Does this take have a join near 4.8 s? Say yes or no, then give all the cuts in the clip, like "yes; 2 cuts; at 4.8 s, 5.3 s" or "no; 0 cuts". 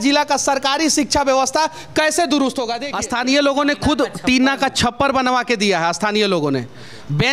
no; 1 cut; at 2.8 s